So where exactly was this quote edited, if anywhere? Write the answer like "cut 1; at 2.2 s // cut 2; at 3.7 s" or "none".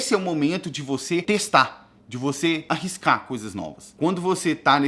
cut 1; at 1.2 s // cut 2; at 2.6 s // cut 3; at 3.8 s